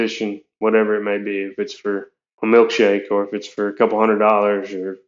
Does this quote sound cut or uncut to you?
uncut